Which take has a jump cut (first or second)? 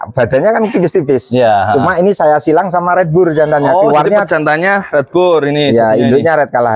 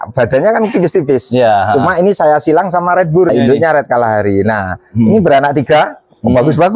second